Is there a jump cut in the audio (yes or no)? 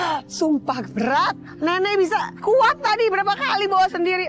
yes